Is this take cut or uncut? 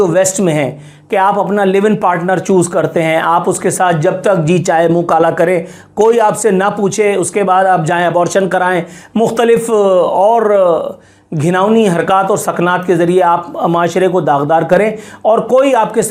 uncut